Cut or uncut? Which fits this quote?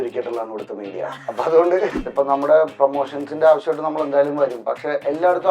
cut